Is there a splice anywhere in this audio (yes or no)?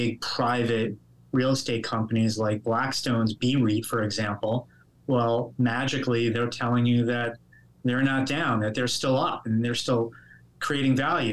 no